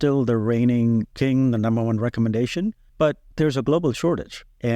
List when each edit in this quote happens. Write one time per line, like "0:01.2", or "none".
0:01.1
0:03.1